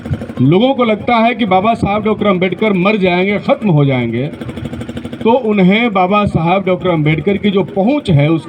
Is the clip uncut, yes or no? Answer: yes